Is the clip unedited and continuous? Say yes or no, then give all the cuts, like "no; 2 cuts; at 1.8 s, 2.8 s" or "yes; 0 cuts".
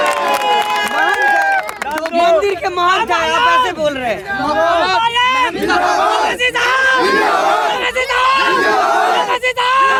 yes; 0 cuts